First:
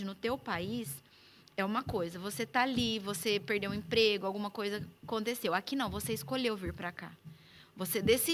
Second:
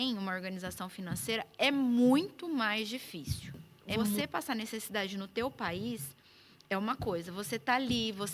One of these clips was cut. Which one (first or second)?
second